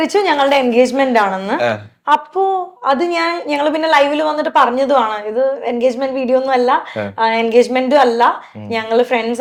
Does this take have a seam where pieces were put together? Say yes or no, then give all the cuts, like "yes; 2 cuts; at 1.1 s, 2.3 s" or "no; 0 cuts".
no; 0 cuts